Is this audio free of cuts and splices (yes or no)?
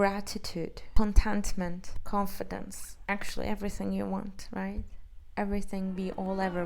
yes